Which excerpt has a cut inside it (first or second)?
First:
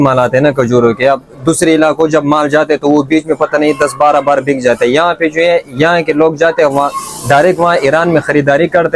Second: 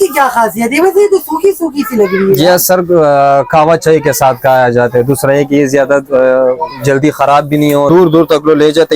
second